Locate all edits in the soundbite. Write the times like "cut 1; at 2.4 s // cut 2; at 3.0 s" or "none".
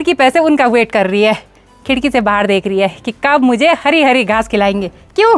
none